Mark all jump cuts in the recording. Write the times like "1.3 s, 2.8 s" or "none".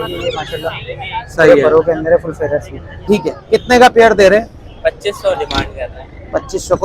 2.9 s